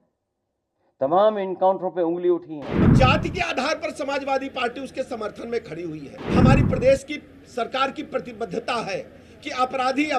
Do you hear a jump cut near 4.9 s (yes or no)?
no